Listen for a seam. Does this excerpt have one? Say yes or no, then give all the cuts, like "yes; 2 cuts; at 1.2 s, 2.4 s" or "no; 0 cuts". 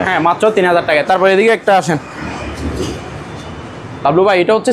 no; 0 cuts